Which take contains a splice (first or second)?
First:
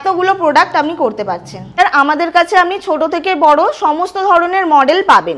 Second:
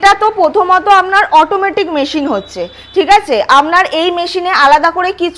first